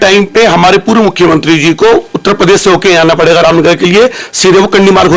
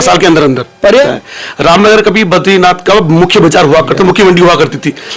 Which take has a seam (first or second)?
second